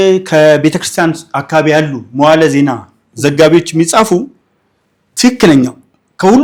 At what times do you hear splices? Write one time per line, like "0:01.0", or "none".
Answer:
none